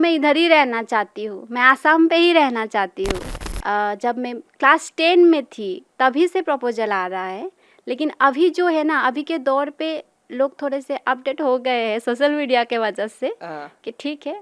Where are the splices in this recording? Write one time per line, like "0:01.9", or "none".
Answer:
0:03.3